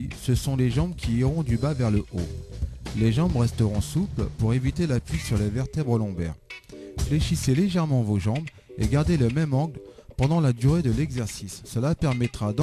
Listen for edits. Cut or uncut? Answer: uncut